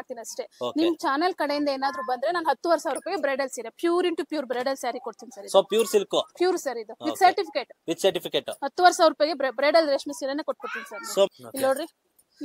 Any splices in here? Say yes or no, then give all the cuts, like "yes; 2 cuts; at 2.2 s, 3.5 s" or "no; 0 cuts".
yes; 1 cut; at 11.3 s